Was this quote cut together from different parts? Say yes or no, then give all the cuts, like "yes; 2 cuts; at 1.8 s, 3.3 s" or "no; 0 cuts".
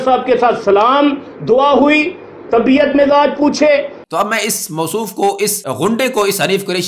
yes; 2 cuts; at 4.0 s, 5.6 s